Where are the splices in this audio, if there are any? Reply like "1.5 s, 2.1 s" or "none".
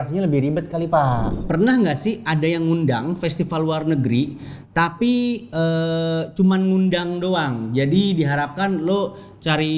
1.3 s